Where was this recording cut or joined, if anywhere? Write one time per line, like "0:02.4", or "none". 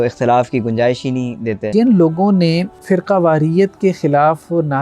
0:01.7
0:02.7